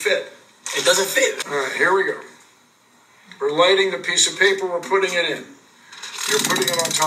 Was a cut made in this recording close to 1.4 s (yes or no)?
yes